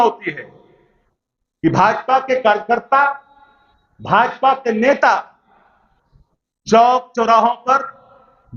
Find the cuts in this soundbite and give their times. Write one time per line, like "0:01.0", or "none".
none